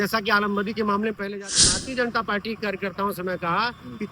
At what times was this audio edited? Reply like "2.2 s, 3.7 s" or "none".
1.7 s